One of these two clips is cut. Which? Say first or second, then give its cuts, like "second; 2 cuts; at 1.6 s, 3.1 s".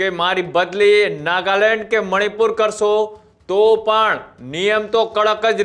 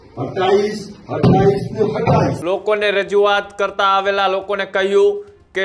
second; 1 cut; at 2.4 s